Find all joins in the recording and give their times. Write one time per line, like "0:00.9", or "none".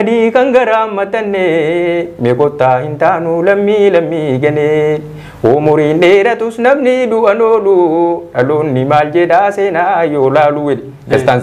none